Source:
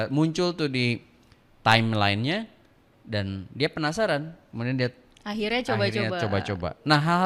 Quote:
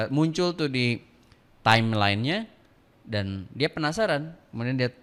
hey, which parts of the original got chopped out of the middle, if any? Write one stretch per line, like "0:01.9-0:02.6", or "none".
none